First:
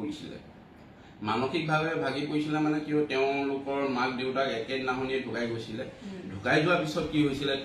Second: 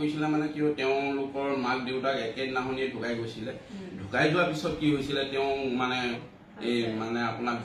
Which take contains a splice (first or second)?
second